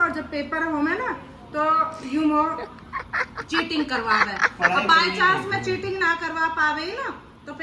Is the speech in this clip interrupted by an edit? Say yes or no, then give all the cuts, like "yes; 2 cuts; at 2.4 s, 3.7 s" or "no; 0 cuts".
no; 0 cuts